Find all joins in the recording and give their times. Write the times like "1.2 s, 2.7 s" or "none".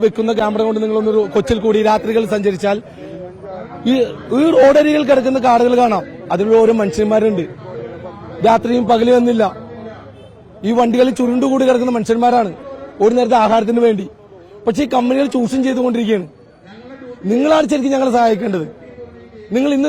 none